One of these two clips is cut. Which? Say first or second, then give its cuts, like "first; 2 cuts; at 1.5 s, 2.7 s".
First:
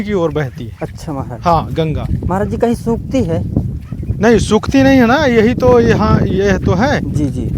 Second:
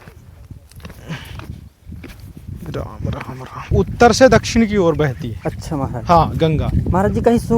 second; 1 cut; at 3.7 s